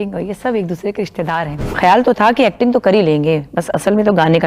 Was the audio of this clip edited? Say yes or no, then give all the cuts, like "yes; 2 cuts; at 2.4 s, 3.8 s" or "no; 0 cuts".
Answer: yes; 1 cut; at 1.7 s